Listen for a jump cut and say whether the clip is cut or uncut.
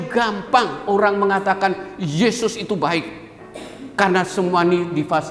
uncut